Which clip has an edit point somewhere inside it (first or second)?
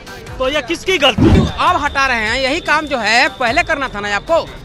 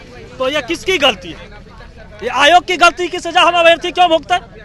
first